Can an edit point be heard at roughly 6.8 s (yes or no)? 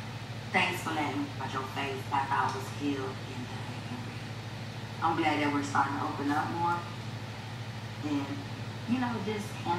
no